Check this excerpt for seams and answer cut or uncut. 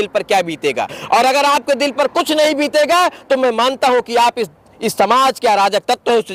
uncut